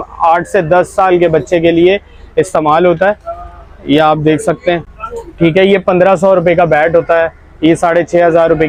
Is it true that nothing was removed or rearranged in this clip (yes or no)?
yes